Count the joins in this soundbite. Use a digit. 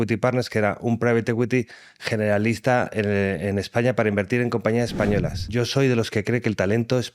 1